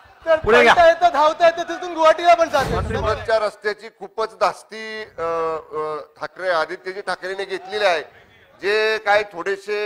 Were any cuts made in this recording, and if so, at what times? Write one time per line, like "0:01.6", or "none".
0:02.9